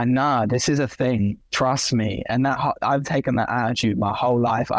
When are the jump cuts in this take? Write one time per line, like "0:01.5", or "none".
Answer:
0:01.4